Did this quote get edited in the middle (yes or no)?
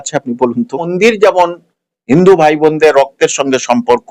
yes